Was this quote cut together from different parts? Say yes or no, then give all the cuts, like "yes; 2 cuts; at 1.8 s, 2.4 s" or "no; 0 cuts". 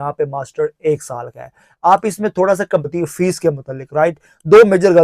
yes; 1 cut; at 2.9 s